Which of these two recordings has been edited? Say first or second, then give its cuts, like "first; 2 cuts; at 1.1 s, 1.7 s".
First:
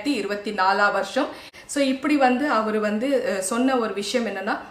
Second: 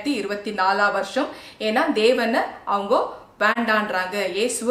first; 1 cut; at 1.5 s